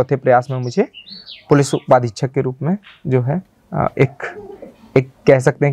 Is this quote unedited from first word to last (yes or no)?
yes